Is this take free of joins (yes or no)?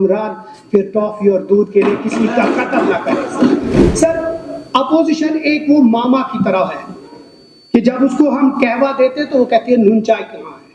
no